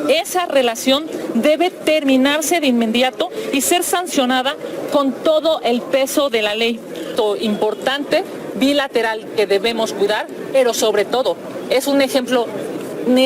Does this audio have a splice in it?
yes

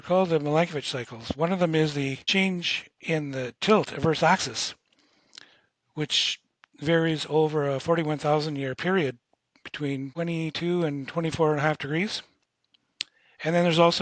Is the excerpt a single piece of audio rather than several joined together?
no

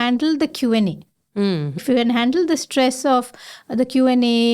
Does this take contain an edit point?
yes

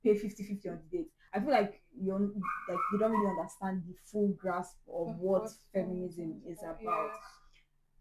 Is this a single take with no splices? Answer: yes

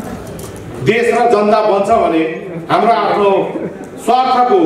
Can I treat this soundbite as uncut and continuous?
yes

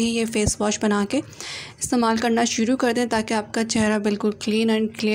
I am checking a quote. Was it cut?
no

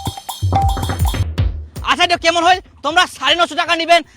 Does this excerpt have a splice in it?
yes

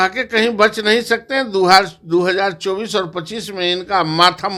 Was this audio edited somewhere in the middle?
no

